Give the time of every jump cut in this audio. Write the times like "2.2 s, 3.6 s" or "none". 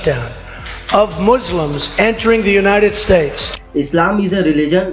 3.6 s